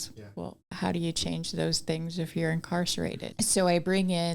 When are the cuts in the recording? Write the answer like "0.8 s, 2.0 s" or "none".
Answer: 3.2 s